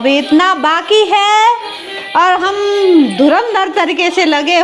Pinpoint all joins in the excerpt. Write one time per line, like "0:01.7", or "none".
none